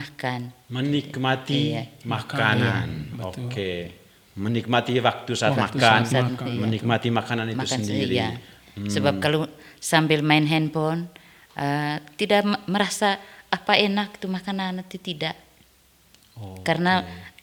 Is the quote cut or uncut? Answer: uncut